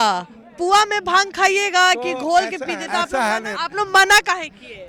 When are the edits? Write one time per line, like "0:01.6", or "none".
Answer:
0:03.1